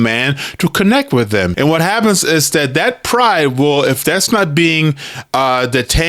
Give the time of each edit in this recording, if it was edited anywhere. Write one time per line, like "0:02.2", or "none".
0:01.5